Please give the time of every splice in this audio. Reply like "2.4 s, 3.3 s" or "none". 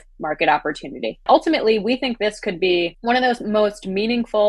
1.2 s, 3.0 s